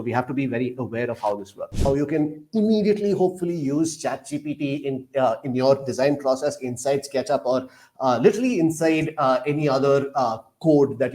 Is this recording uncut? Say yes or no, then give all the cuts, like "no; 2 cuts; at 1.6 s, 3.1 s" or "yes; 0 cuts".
no; 1 cut; at 1.8 s